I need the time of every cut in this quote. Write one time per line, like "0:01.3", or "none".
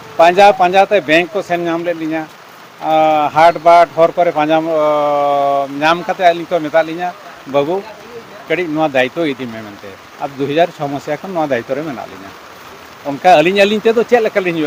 none